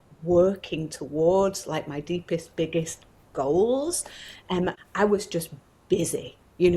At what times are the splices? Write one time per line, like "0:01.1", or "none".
0:04.8